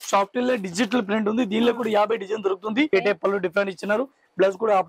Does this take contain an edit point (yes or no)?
yes